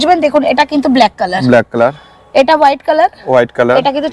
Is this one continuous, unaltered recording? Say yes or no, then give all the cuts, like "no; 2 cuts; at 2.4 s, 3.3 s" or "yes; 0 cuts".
yes; 0 cuts